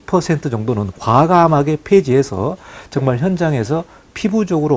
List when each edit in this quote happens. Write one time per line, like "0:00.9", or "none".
none